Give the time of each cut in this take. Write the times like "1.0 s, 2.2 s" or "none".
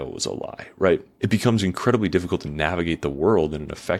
none